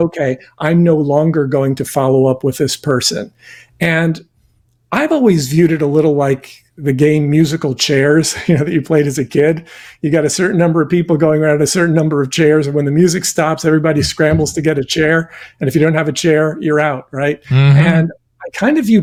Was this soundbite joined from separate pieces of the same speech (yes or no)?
no